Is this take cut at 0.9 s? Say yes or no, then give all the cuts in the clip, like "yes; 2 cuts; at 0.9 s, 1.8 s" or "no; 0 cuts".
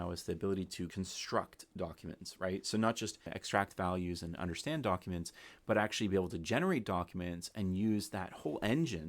yes; 2 cuts; at 0.9 s, 3.4 s